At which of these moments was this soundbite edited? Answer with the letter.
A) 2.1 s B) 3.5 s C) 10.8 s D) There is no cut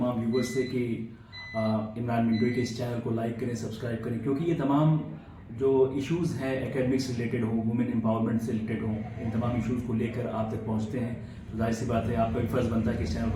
D